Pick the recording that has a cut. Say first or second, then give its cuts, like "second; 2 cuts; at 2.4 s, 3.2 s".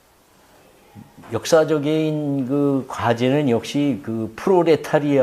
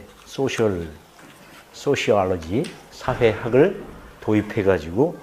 first; 1 cut; at 3.2 s